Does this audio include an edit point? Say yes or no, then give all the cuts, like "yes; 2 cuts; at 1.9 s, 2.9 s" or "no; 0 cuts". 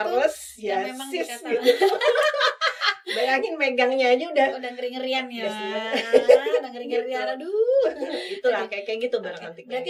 no; 0 cuts